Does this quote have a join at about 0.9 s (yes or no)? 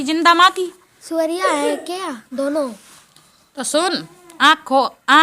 yes